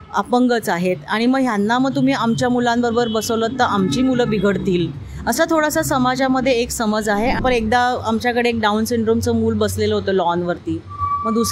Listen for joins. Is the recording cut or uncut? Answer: cut